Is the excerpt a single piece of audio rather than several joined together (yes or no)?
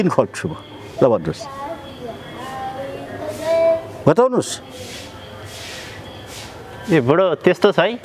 yes